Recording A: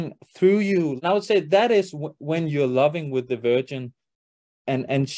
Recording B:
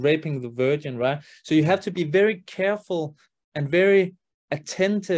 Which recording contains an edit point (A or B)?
A